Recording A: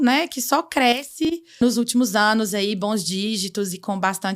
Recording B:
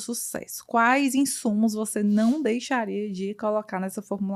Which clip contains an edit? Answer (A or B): A